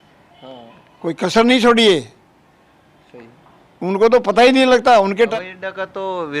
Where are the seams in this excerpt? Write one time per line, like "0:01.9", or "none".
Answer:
0:05.3